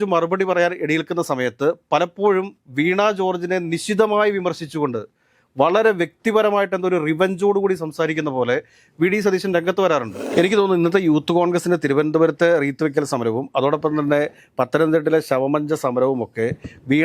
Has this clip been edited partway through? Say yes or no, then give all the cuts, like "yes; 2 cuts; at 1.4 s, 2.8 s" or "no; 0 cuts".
yes; 1 cut; at 10.2 s